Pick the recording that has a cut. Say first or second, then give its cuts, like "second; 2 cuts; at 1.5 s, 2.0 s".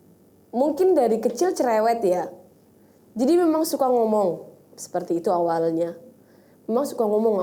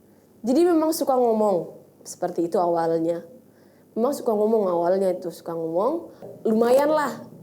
second; 1 cut; at 6.3 s